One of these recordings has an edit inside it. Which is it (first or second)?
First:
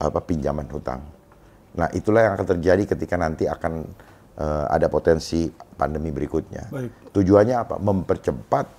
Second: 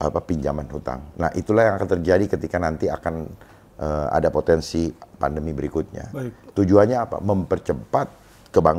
second